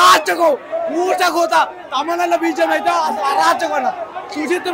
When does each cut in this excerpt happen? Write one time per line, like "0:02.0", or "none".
none